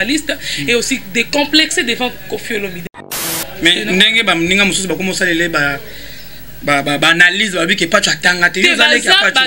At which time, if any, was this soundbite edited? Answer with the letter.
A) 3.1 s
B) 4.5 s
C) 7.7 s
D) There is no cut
A